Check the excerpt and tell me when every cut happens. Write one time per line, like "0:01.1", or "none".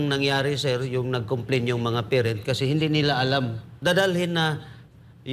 0:03.7